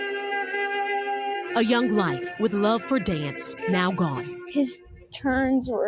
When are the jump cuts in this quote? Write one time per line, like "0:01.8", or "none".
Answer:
0:04.3